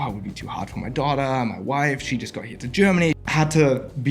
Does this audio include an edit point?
yes; 1 cut; at 3.2 s

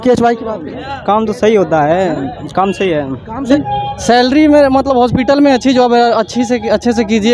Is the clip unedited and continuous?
no; 1 cut; at 3.5 s

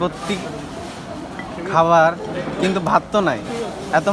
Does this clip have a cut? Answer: no; 0 cuts

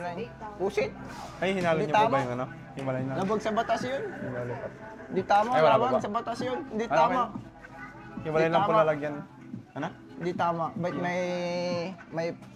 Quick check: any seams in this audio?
no; 0 cuts

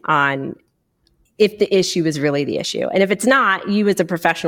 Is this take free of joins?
no; 1 cut; at 1.1 s

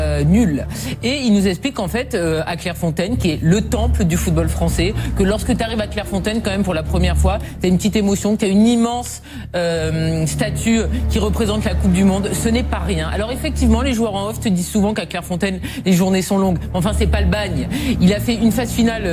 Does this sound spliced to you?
yes; 1 cut; at 13.5 s

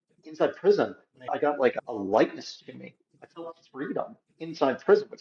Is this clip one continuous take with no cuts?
no; 1 cut; at 1.3 s

